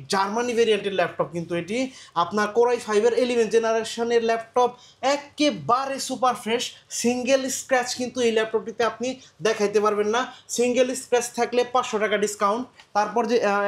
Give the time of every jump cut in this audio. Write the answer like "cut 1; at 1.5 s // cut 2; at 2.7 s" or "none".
none